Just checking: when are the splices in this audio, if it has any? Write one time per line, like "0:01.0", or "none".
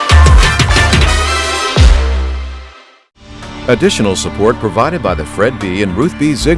0:03.5